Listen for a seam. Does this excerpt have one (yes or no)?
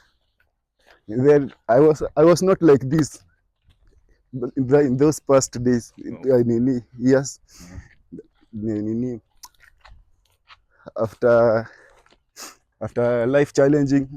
no